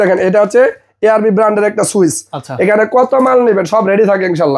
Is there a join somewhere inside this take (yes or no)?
no